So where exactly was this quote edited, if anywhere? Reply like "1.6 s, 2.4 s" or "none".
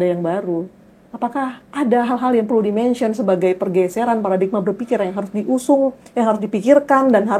1.6 s